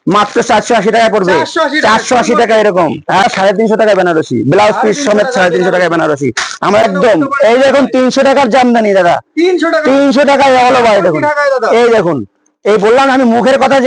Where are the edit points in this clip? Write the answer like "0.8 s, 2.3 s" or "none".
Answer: 3.2 s, 6.8 s

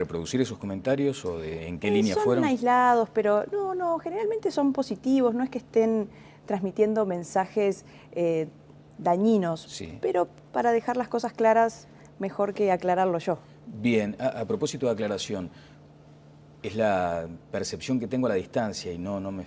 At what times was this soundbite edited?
11.2 s

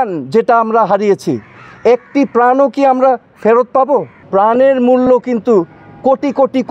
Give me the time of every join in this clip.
4.2 s

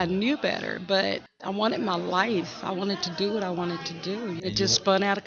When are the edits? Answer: 4.4 s

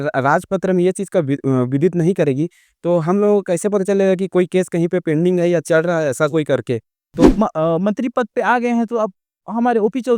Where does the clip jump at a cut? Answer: 7.3 s

